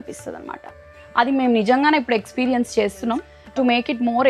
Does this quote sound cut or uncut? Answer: cut